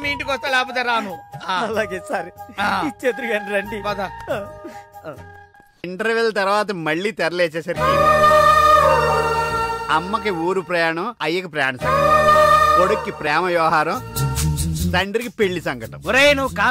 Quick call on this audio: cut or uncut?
cut